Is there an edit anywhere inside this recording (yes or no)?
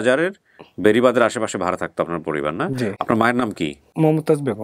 no